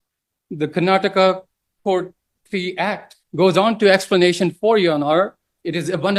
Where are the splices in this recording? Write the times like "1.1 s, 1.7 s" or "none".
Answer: none